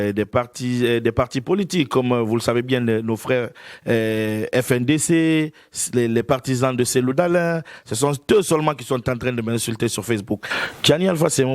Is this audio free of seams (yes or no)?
no